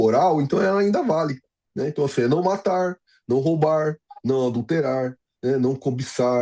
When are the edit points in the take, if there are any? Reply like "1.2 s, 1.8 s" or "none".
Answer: none